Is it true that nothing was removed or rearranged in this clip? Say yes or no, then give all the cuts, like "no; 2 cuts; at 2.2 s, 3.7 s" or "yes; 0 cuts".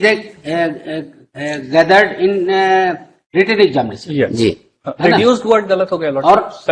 yes; 0 cuts